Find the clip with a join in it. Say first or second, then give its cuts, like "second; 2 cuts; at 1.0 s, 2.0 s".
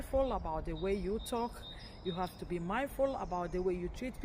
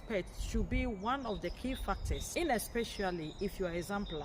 second; 1 cut; at 2.2 s